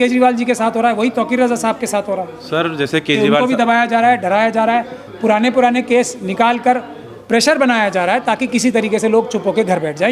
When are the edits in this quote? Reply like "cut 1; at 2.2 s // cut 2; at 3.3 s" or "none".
none